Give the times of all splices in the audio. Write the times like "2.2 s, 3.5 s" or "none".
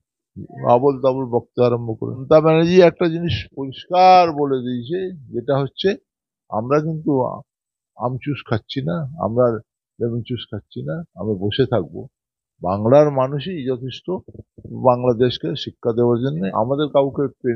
2.2 s, 16.3 s